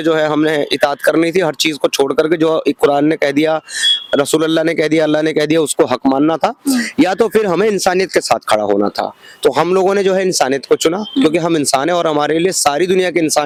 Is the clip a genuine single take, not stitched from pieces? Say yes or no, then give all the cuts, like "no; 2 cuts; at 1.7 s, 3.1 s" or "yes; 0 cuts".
yes; 0 cuts